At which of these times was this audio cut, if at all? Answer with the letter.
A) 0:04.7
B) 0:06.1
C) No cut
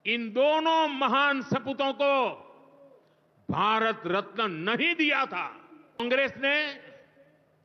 B